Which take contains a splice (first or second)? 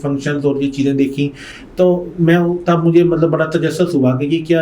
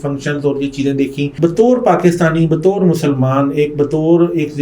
second